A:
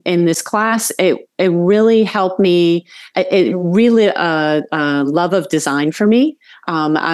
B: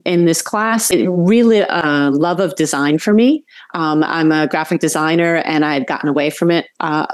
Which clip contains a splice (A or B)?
B